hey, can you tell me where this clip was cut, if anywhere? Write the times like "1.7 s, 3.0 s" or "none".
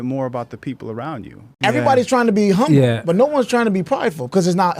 1.6 s